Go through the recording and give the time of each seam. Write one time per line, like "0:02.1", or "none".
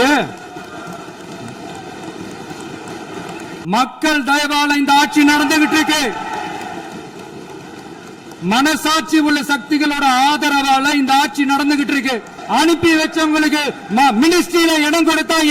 0:03.5
0:12.3